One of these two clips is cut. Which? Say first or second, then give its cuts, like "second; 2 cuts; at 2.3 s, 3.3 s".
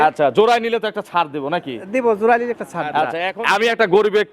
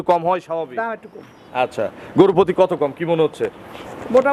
first; 1 cut; at 3.2 s